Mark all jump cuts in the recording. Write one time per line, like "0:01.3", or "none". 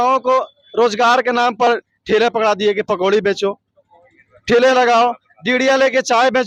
none